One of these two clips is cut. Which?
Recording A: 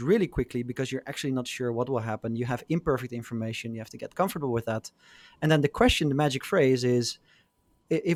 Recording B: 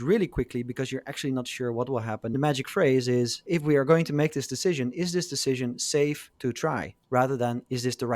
B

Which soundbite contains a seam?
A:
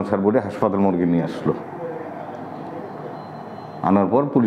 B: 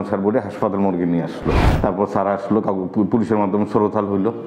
B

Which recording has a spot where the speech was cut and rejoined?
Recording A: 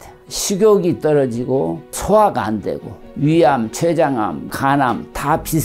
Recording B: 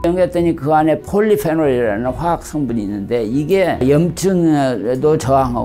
A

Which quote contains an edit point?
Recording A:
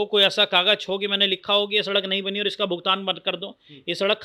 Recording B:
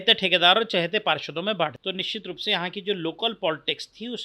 B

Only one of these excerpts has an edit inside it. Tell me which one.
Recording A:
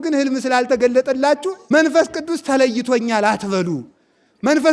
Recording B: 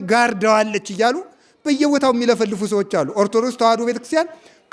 A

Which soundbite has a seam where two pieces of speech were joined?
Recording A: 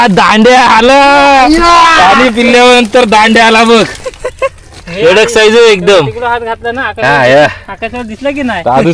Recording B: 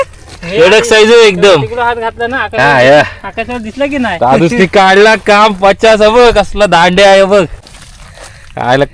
B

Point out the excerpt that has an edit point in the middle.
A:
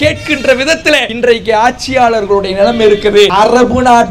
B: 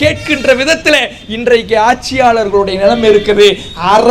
A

